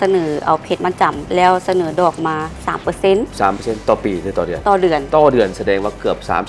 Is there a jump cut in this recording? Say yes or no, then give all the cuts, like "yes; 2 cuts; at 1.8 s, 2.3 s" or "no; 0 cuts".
no; 0 cuts